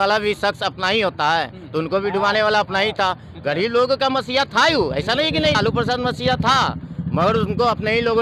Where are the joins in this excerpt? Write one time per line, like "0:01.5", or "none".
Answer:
none

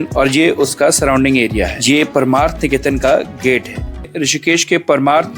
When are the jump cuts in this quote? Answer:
0:04.1

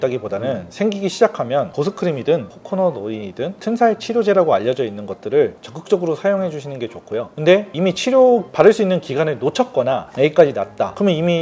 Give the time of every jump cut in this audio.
none

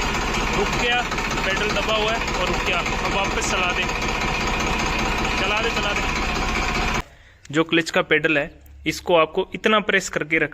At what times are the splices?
0:07.0

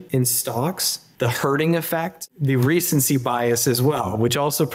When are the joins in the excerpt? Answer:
0:02.3

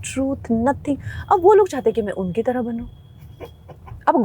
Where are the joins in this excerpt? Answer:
none

